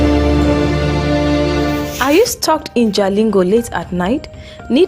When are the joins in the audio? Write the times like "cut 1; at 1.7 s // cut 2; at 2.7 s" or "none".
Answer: cut 1; at 1.9 s